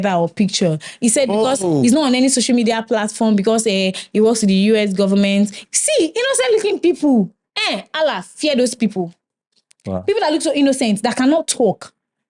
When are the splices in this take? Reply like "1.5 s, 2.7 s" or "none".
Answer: 5.6 s

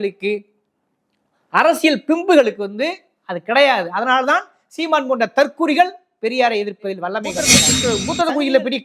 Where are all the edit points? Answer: 7.7 s

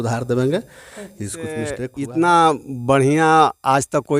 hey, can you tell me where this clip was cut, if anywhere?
1.8 s

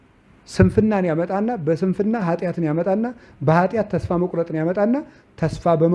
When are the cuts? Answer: none

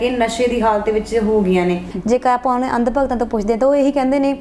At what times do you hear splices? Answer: 1.9 s

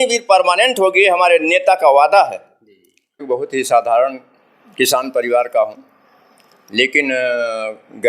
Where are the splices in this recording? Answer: 3.3 s

